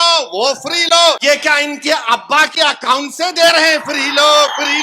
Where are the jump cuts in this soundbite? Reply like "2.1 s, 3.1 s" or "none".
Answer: 1.2 s